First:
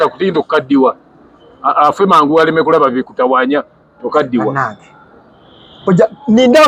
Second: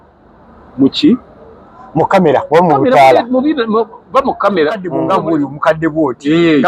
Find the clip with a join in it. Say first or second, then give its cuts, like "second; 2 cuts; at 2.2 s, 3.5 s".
second; 1 cut; at 4.9 s